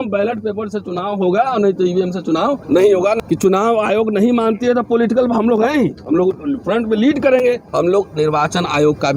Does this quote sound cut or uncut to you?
cut